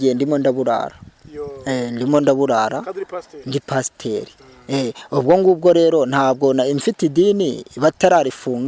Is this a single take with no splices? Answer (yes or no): yes